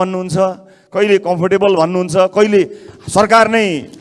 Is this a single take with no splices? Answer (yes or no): yes